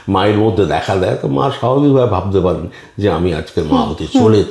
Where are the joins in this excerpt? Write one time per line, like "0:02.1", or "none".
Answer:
none